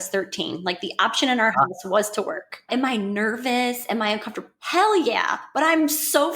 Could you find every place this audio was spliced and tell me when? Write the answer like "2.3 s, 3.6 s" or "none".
2.7 s